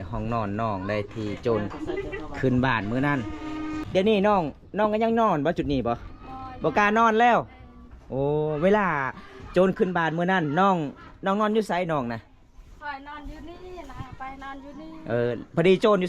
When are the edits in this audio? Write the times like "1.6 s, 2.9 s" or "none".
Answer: 3.8 s